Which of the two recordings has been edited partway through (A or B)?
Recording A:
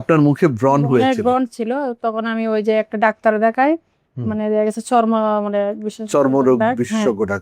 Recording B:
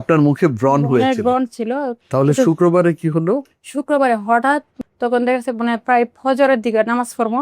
B